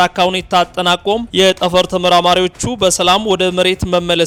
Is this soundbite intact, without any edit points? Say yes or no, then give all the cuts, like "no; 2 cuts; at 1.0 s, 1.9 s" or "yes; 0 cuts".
yes; 0 cuts